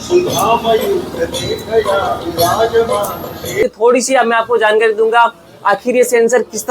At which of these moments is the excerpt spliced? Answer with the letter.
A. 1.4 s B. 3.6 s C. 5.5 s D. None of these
B